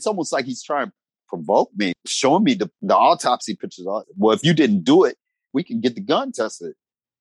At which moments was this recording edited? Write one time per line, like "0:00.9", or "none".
0:01.1
0:01.9
0:02.7
0:04.0
0:05.5